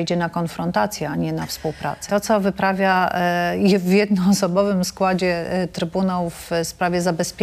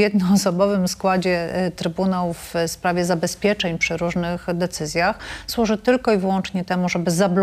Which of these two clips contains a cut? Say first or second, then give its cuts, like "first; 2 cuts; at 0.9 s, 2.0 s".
first; 1 cut; at 2.0 s